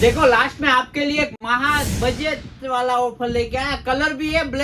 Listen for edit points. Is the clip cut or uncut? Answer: uncut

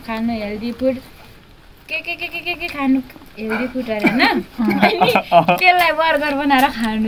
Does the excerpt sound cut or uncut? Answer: uncut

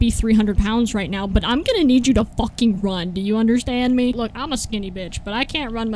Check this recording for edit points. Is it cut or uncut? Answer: cut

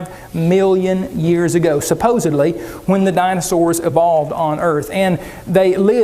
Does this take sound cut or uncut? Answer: cut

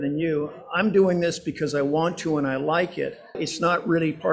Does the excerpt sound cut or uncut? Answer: cut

